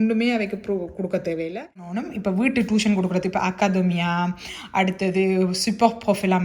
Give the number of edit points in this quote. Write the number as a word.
one